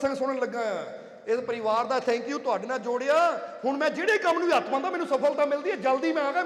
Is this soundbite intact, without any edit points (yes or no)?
yes